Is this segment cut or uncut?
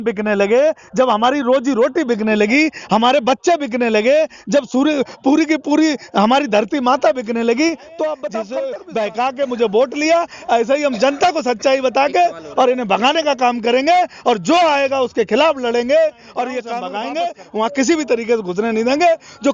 cut